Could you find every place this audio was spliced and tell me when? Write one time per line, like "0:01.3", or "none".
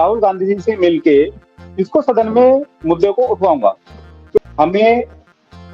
0:04.4